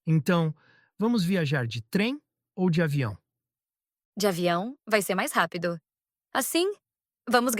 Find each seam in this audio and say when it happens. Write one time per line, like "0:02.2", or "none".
0:04.0